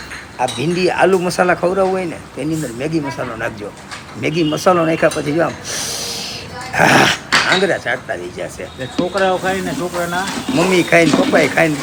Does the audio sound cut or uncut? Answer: uncut